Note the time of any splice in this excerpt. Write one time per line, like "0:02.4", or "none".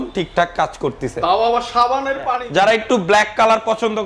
0:02.4